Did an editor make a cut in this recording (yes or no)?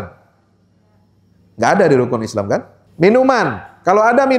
yes